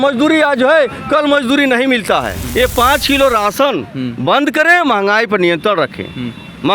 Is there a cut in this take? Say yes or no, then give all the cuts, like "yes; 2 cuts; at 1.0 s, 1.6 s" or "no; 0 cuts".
yes; 1 cut; at 2.4 s